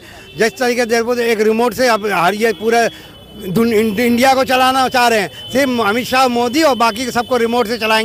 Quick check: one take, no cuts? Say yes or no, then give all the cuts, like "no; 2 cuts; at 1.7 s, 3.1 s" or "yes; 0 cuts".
yes; 0 cuts